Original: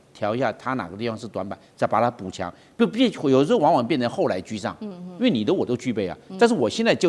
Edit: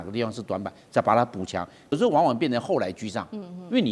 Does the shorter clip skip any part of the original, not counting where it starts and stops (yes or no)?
yes